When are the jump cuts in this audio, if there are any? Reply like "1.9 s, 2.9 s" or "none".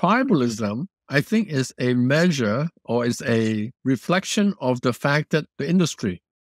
0.9 s, 3.7 s, 5.5 s